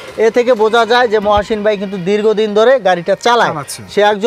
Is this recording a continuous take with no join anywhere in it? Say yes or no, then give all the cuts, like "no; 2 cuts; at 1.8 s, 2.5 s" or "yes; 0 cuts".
yes; 0 cuts